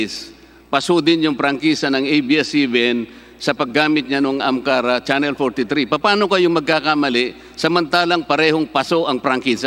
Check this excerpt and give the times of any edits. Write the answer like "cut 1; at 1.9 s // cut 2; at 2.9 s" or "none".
none

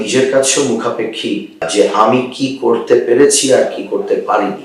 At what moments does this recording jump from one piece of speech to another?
cut 1; at 1.7 s

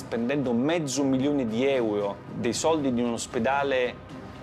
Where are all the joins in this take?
cut 1; at 2.2 s

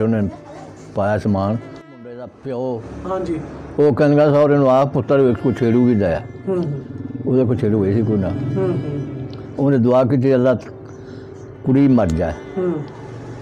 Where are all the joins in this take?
cut 1; at 1.9 s

